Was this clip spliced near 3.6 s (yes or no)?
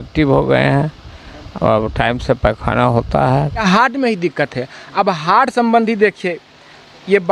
yes